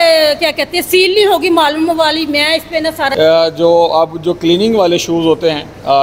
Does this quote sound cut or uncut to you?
cut